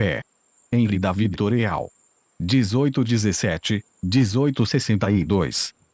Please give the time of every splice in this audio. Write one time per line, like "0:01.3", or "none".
0:01.1